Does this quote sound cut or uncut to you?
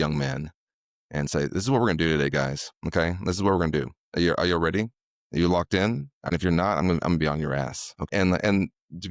cut